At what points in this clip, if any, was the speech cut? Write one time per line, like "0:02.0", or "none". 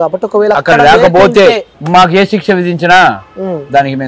0:01.7

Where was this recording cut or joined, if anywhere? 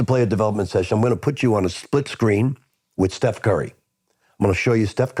none

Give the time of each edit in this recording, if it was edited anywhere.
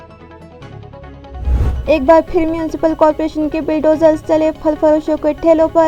0:01.7

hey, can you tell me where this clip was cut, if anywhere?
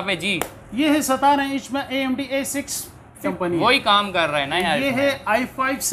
0:03.2

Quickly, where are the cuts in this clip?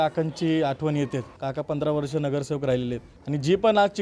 0:01.4
0:03.1

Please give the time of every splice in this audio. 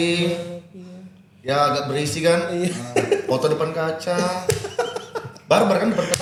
none

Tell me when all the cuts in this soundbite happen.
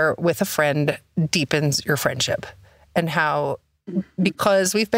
none

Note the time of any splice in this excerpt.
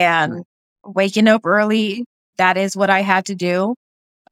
0:00.8
0:02.3

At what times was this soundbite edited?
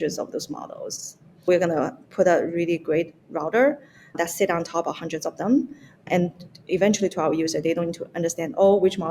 0:01.5
0:04.1
0:06.0

